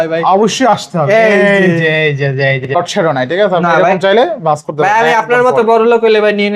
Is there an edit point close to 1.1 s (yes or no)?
no